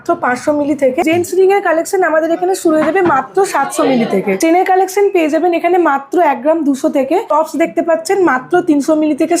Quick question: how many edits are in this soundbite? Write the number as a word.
three